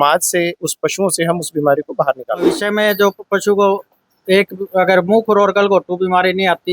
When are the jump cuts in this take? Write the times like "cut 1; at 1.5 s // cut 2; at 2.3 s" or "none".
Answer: cut 1; at 2.5 s